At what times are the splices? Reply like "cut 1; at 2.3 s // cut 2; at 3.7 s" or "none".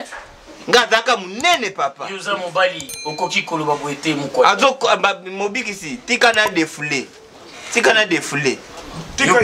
none